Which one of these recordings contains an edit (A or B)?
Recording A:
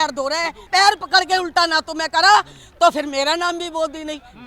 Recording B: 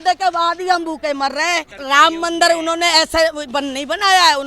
B